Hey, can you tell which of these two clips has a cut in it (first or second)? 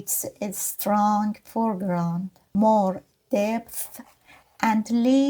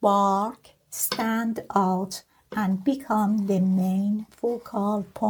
first